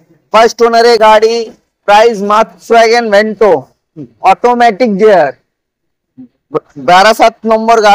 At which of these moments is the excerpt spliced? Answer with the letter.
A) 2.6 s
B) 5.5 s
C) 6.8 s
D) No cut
A